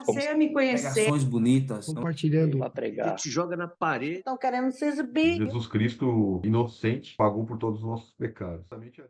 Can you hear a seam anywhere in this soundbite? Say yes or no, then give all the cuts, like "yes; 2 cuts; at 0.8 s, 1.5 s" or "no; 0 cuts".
no; 0 cuts